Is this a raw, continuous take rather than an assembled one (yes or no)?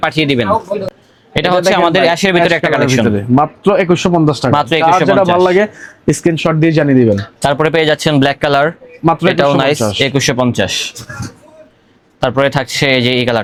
yes